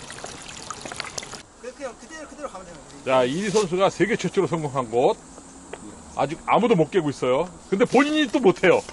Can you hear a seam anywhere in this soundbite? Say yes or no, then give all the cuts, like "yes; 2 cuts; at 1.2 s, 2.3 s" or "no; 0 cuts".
yes; 1 cut; at 1.4 s